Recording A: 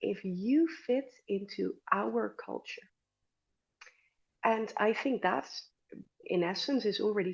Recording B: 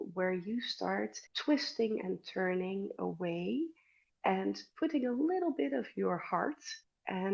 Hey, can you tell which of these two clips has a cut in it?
A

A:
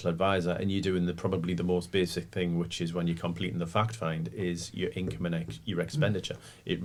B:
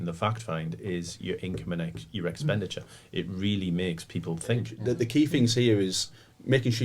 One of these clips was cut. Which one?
B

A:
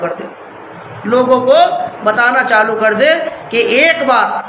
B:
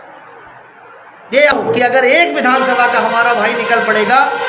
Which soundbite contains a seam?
B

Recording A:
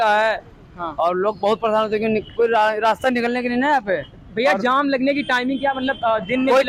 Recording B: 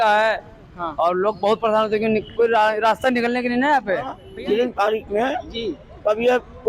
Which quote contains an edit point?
B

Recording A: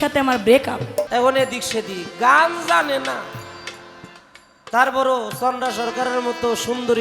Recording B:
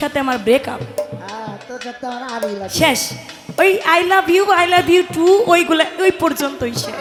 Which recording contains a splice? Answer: A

